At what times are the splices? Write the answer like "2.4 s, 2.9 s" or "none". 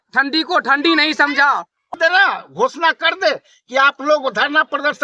1.9 s